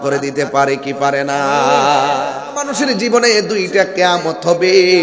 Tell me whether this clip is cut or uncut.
cut